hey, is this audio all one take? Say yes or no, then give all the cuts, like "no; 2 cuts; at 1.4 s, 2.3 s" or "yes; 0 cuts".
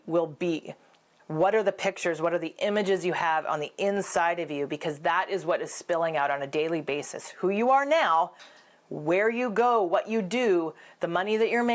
no; 1 cut; at 1.1 s